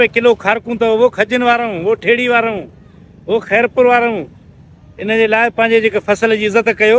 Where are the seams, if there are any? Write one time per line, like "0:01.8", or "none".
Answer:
none